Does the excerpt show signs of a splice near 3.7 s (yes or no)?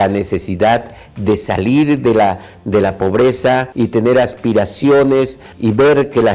yes